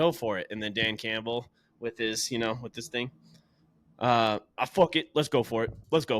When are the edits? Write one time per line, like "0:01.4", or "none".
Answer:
none